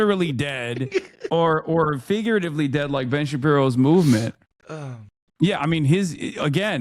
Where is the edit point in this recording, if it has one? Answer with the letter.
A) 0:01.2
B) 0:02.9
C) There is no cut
C